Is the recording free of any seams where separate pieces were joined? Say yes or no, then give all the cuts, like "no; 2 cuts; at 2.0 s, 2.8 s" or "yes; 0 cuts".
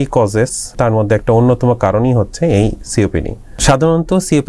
no; 2 cuts; at 0.7 s, 3.4 s